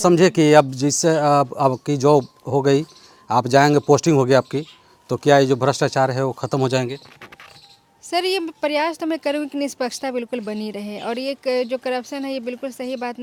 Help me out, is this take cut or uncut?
uncut